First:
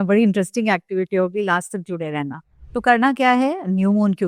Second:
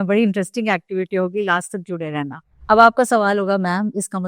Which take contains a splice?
second; 1 cut; at 2.5 s

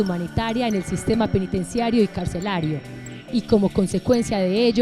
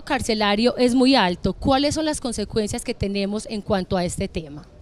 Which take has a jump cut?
second; 1 cut; at 2.3 s

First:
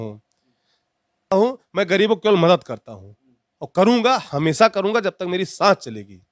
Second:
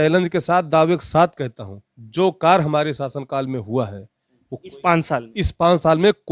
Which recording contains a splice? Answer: first; 1 cut; at 1.3 s

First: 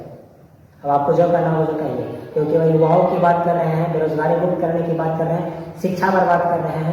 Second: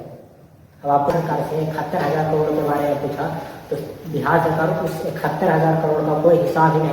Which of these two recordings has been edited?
second; 1 cut; at 1.1 s

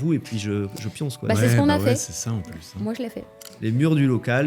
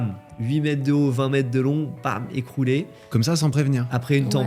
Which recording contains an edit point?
first; 1 cut; at 3.5 s

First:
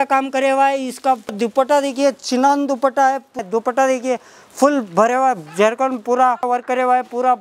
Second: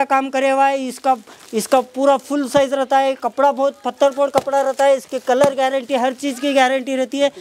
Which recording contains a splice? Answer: first; 3 cuts; at 1.4 s, 3.4 s, 6.4 s

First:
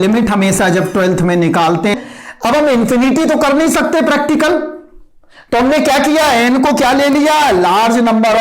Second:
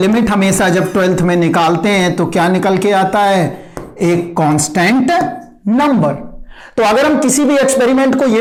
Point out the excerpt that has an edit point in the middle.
first; 1 cut; at 2.0 s

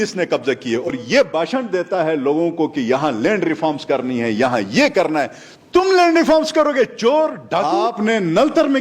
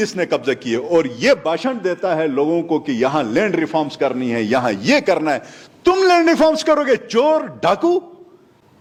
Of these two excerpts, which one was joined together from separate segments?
first; 2 cuts; at 0.9 s, 7.7 s

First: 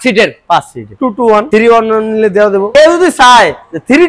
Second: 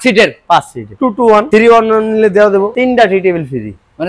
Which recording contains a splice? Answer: second; 1 cut; at 2.7 s

